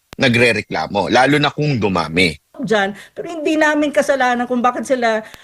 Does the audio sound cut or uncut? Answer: cut